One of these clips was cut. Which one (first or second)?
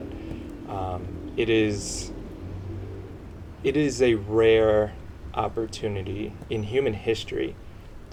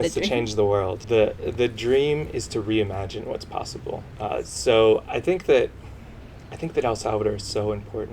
second